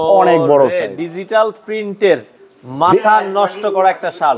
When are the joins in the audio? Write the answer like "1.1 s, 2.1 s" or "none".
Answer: none